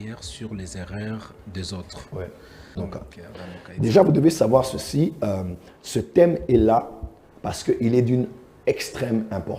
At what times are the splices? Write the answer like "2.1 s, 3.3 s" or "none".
2.8 s